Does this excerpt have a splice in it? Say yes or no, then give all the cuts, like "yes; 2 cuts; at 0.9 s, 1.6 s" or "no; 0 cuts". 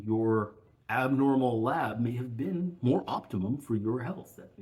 no; 0 cuts